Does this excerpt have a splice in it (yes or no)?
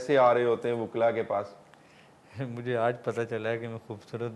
no